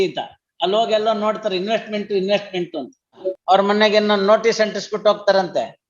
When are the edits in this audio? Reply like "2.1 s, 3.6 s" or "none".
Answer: 3.3 s